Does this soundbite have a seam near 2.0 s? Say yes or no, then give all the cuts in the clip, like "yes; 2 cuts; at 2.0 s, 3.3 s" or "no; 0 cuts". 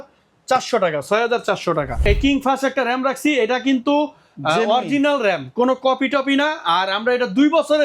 yes; 1 cut; at 2.0 s